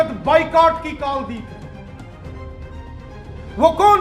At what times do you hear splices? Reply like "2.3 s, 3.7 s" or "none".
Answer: 1.5 s, 2.9 s